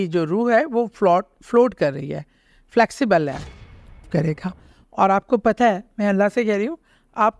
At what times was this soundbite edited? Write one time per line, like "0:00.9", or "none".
0:04.0

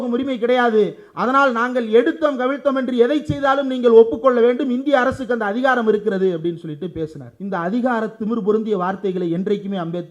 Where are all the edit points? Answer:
0:07.3

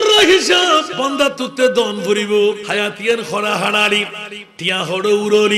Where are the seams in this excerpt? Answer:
0:00.9
0:02.7

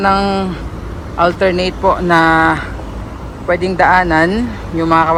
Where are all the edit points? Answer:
none

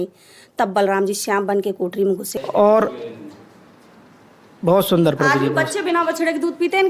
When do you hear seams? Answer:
0:02.3

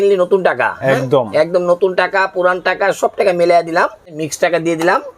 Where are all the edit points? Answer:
0:04.1

